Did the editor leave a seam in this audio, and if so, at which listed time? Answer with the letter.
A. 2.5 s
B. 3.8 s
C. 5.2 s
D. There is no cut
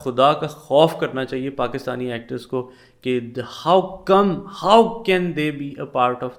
D